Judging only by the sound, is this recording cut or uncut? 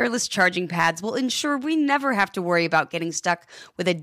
uncut